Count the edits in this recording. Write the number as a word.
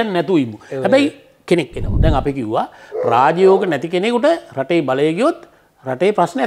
one